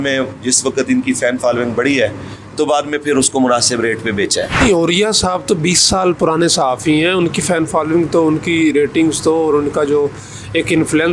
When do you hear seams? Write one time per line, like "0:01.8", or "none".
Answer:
0:04.6